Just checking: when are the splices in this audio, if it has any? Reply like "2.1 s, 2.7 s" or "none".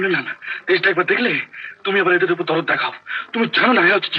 none